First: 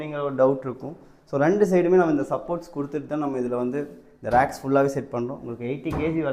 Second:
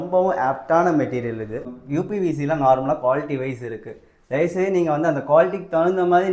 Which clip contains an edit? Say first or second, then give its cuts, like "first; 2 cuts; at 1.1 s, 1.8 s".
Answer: second; 1 cut; at 1.8 s